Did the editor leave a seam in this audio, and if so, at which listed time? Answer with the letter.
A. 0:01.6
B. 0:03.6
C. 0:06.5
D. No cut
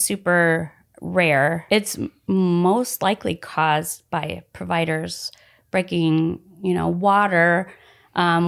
A